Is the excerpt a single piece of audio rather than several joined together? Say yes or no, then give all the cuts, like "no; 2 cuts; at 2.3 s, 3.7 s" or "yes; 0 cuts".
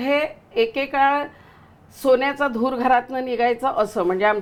yes; 0 cuts